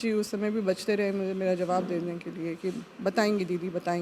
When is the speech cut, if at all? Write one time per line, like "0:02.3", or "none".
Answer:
none